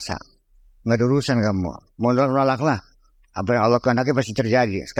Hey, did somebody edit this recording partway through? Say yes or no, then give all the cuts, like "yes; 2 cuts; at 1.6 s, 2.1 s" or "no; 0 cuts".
no; 0 cuts